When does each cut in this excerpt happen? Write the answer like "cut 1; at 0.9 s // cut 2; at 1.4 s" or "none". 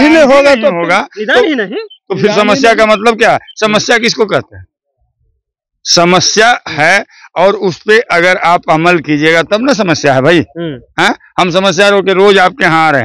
none